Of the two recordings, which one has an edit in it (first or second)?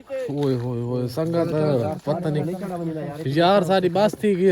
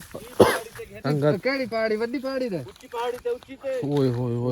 second